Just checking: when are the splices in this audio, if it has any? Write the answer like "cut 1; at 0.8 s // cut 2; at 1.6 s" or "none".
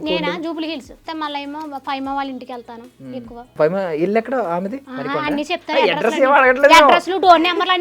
cut 1; at 1.1 s // cut 2; at 3.5 s // cut 3; at 4.9 s